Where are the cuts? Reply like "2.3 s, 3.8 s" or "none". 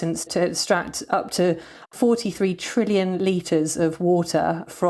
none